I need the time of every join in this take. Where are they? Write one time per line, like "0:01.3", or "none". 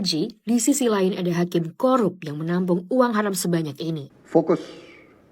0:04.1